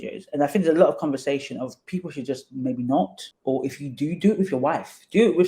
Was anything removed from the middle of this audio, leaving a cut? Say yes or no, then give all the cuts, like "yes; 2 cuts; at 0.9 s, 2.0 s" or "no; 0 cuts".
yes; 1 cut; at 3.3 s